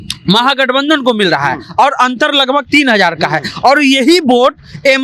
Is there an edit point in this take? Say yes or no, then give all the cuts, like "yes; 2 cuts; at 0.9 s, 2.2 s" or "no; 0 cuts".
no; 0 cuts